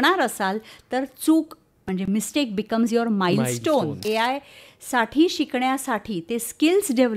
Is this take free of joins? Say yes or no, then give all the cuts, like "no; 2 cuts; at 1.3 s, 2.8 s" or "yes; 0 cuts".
no; 1 cut; at 4.0 s